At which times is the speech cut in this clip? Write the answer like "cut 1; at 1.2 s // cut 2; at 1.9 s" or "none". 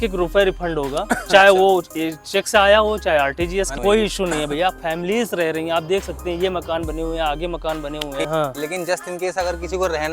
cut 1; at 3.7 s // cut 2; at 8.3 s